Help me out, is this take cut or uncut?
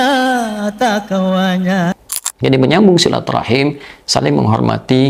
uncut